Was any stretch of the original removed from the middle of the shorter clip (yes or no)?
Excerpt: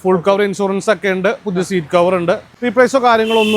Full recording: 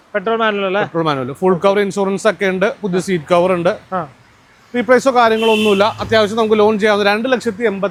yes